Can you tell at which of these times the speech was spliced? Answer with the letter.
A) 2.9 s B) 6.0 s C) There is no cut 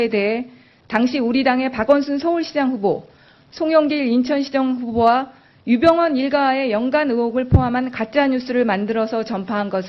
A